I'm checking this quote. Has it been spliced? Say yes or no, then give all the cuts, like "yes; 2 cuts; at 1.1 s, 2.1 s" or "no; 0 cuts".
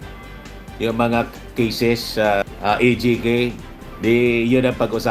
no; 0 cuts